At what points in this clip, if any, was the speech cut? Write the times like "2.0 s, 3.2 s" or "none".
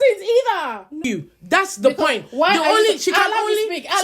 1.0 s